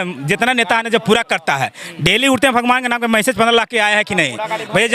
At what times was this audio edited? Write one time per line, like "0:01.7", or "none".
none